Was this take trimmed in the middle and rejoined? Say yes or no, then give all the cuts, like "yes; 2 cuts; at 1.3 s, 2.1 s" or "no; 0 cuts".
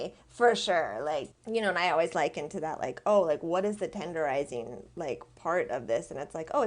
yes; 1 cut; at 1.3 s